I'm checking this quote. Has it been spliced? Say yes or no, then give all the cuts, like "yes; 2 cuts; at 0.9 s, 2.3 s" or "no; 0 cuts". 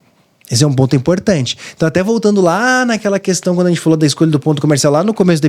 no; 0 cuts